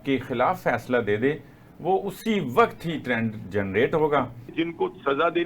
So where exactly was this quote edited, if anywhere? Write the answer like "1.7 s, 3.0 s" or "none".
4.5 s